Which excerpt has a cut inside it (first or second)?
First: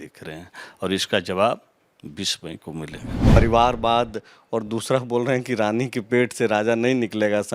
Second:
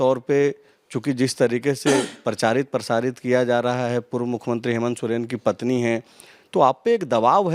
first